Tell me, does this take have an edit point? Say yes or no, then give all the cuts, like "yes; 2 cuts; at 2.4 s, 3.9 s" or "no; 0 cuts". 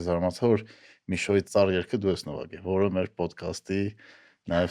yes; 1 cut; at 1.5 s